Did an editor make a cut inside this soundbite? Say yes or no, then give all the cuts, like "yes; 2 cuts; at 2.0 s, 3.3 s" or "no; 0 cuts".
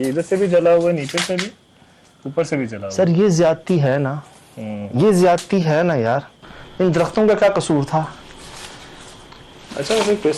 no; 0 cuts